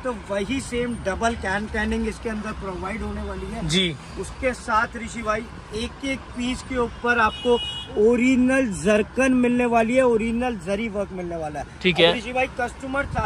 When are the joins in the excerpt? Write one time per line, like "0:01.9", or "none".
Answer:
none